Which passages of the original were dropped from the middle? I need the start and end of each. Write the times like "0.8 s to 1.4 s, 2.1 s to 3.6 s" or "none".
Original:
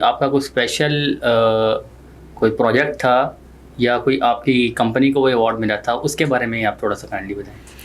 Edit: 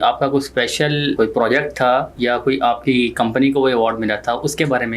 1.1 s to 2.4 s, 3.3 s to 3.7 s